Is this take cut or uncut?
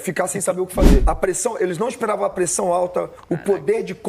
cut